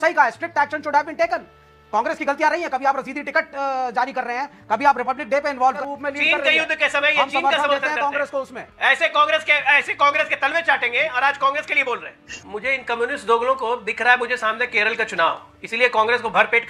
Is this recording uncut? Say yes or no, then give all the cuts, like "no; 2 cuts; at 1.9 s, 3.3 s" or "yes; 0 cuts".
no; 2 cuts; at 5.8 s, 12.4 s